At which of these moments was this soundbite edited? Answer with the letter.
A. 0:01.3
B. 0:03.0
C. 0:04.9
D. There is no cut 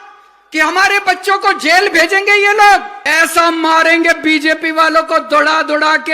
B